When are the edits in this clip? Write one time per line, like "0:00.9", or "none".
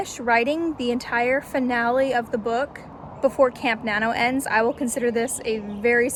none